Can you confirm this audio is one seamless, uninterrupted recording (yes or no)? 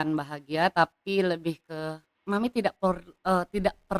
no